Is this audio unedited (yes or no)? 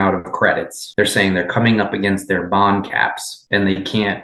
yes